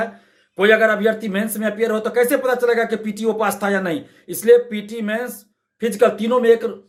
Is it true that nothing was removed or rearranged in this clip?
yes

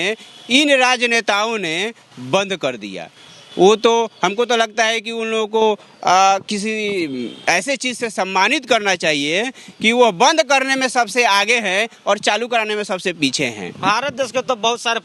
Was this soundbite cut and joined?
no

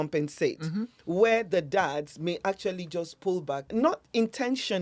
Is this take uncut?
no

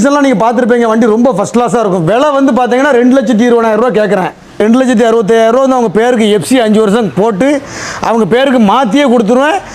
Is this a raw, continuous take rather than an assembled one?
no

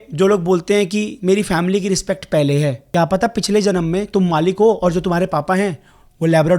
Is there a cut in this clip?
yes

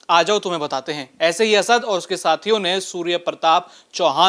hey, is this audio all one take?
yes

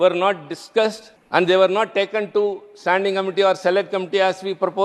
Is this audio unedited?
no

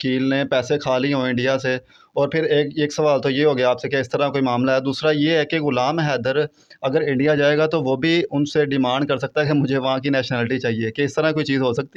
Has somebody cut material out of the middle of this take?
no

